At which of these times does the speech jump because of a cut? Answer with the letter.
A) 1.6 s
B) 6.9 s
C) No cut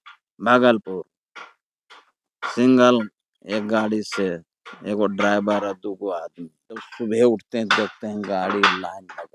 B